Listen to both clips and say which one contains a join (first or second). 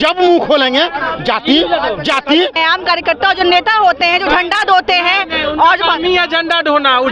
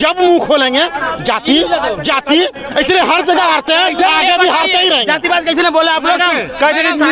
first